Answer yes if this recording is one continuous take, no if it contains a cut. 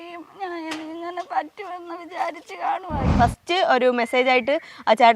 no